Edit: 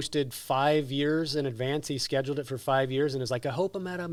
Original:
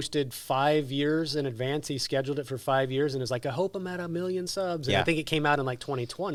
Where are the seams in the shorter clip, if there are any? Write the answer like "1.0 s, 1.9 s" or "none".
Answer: none